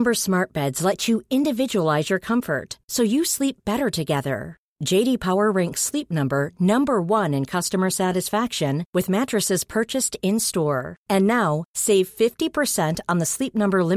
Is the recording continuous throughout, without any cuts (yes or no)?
yes